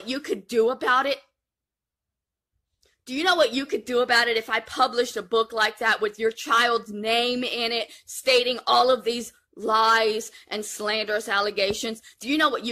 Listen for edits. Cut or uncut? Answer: uncut